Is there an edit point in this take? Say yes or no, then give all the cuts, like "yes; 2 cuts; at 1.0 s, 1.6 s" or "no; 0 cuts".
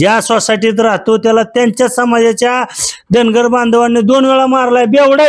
no; 0 cuts